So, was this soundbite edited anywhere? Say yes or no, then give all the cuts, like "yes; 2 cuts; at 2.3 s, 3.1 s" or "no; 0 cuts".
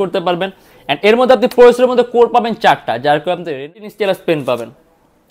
yes; 1 cut; at 3.7 s